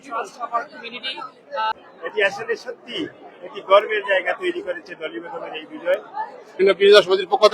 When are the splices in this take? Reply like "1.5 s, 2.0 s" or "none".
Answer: 1.7 s, 6.6 s